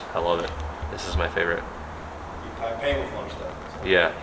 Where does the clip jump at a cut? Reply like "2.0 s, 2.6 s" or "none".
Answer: none